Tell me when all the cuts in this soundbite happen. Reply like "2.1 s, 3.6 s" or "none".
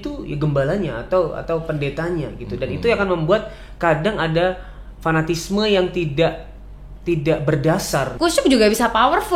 8.1 s